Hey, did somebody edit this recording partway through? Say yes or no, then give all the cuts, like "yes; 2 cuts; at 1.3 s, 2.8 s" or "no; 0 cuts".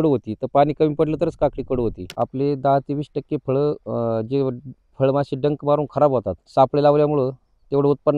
yes; 2 cuts; at 2.1 s, 6.4 s